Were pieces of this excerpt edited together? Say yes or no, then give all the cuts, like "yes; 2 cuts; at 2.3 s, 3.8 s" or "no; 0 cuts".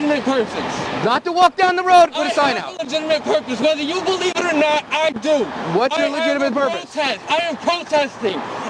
no; 0 cuts